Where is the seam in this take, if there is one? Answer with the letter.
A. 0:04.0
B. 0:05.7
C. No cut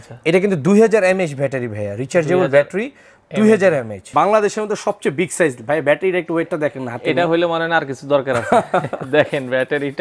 A